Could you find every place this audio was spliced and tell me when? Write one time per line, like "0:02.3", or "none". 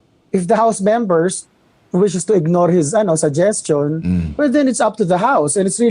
0:04.5

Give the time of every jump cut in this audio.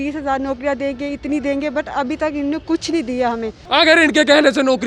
0:03.6

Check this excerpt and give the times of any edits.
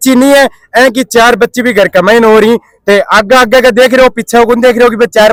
none

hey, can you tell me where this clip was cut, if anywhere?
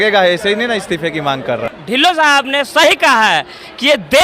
0:01.7

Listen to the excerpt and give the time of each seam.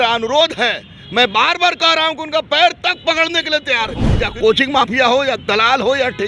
0:04.1

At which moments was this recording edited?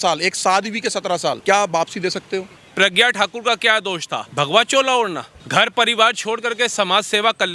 0:01.4
0:02.6
0:04.2
0:05.3

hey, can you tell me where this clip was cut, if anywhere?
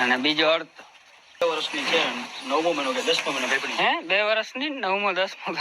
0:01.4

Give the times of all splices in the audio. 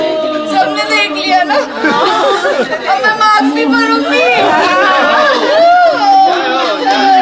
none

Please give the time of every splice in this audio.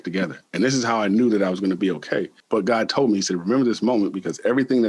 0:02.4

